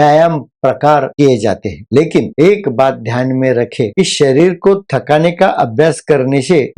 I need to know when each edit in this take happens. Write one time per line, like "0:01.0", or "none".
none

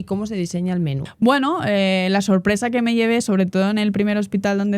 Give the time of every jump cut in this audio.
0:01.0

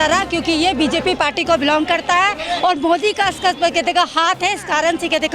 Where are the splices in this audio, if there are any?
none

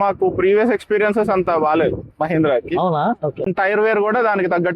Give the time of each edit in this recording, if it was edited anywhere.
0:03.4

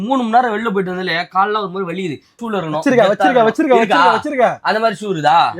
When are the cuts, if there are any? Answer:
0:02.4

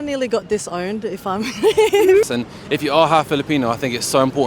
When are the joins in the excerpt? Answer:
0:02.2

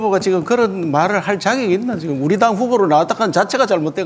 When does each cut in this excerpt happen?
none

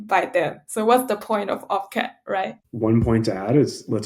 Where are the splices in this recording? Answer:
0:02.3

